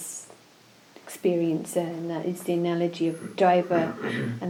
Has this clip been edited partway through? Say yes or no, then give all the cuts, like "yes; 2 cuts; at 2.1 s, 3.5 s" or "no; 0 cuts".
no; 0 cuts